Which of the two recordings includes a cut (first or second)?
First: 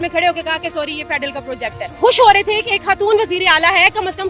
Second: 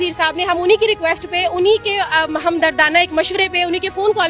first